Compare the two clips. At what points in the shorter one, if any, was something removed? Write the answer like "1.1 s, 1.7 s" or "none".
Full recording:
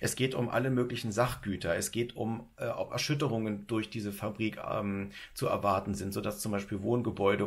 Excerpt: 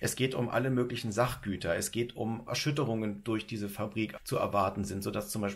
2.5 s, 4.2 s